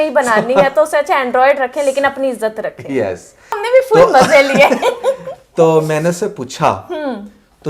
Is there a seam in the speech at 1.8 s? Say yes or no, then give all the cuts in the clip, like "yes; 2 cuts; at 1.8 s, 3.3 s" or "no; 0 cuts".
no; 1 cut; at 3.6 s